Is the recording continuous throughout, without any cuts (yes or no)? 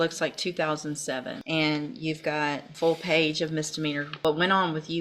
no